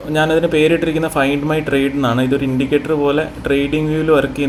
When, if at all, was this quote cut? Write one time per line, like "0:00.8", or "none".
none